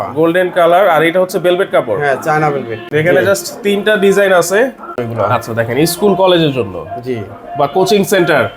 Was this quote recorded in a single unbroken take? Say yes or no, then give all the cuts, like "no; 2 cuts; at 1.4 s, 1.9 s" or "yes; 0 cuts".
no; 2 cuts; at 2.8 s, 5.0 s